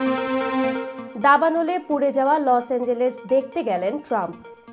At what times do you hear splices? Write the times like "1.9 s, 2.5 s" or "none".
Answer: none